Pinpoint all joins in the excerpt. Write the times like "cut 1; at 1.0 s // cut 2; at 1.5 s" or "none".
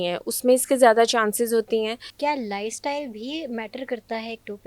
cut 1; at 2.0 s